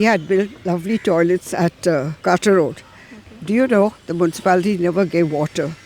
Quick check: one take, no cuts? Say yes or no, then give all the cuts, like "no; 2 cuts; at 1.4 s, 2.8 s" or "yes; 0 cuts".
no; 1 cut; at 2.1 s